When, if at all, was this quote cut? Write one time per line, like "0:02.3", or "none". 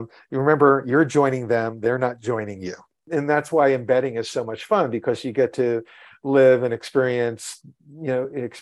0:03.0